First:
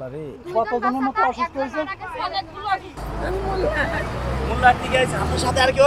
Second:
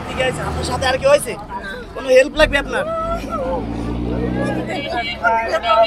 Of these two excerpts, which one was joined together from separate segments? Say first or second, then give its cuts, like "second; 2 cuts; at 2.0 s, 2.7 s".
first; 1 cut; at 3.0 s